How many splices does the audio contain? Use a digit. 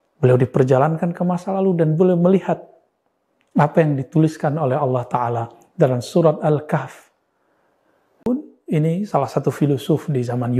1